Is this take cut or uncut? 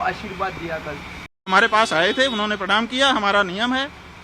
cut